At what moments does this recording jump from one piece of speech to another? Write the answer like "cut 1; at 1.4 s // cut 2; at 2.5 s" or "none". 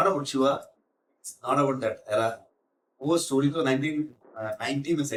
none